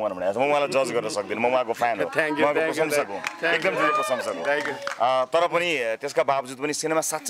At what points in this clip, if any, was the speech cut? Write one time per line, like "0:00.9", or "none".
none

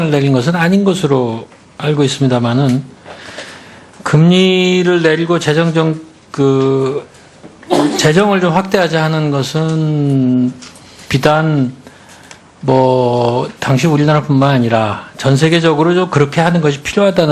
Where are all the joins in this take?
0:09.3

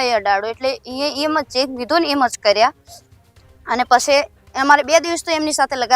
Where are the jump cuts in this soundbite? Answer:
none

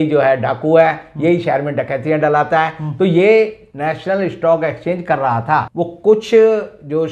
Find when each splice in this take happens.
0:05.7

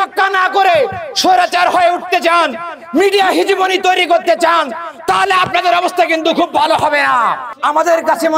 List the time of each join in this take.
0:07.5

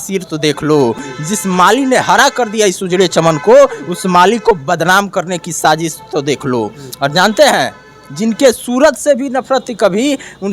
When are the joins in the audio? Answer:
none

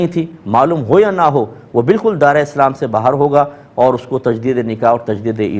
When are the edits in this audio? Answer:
none

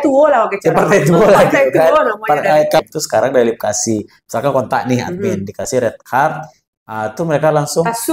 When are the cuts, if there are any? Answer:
0:02.8

